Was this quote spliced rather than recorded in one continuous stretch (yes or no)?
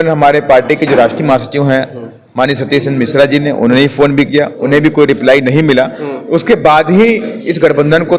no